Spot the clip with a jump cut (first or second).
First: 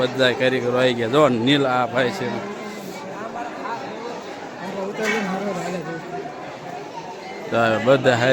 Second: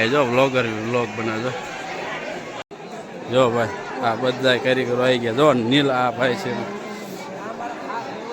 second